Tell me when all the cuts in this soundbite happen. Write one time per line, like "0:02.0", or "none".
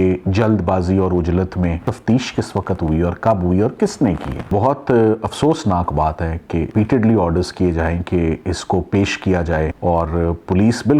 0:01.9
0:04.5
0:06.7
0:09.7

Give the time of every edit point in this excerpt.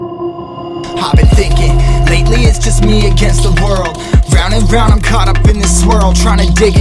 none

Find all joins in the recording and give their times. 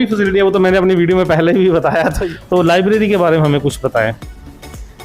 0:02.2

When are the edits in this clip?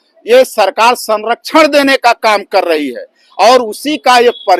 none

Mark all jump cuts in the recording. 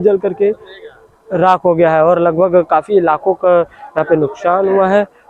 none

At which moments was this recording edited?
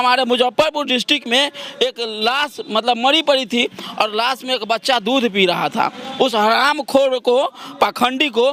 none

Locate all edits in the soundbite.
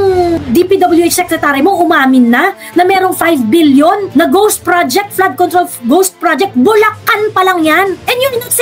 none

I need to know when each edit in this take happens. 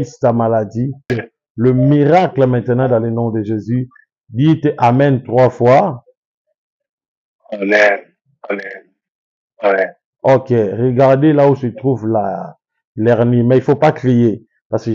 0:01.1

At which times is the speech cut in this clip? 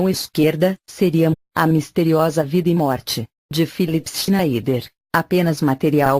none

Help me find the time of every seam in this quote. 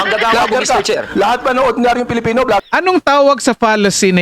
0:02.6

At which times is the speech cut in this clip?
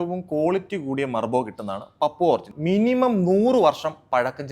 0:02.5

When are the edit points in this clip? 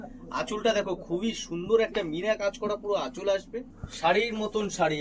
0:03.7

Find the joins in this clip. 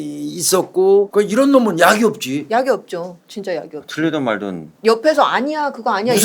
0:01.1

